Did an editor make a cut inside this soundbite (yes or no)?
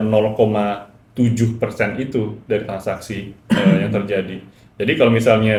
no